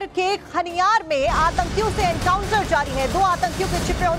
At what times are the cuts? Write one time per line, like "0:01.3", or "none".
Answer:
none